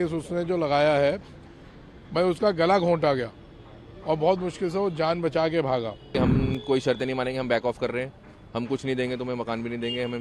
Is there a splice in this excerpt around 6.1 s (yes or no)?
yes